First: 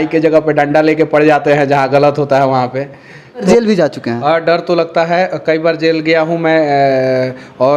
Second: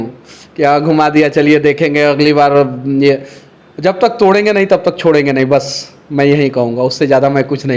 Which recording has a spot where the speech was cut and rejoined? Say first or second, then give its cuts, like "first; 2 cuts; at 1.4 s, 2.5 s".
first; 1 cut; at 3.4 s